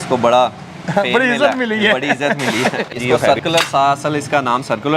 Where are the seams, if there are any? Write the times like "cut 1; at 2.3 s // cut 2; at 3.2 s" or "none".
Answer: cut 1; at 2.9 s